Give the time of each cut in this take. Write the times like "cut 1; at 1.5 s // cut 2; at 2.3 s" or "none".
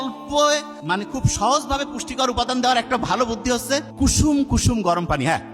cut 1; at 1.0 s // cut 2; at 3.9 s

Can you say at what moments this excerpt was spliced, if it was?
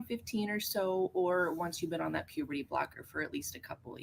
cut 1; at 1.3 s

